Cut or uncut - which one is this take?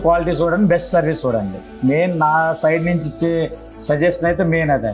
cut